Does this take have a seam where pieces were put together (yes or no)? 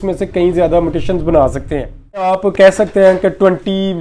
yes